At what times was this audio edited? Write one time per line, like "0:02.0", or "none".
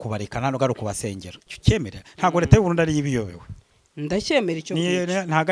0:01.3